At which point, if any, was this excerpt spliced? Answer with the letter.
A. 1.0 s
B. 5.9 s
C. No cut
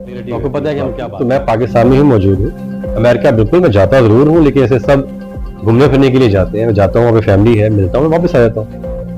A